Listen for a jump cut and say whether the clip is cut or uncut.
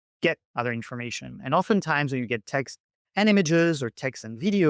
uncut